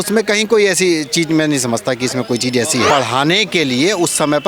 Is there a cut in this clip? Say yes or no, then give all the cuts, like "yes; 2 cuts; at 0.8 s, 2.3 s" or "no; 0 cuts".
yes; 1 cut; at 2.9 s